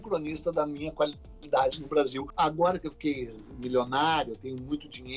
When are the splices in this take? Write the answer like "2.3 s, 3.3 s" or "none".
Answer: 2.2 s